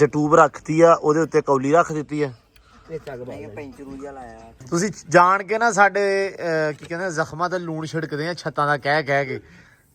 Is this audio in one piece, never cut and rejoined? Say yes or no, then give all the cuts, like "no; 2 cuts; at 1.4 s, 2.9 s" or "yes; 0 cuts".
no; 1 cut; at 4.5 s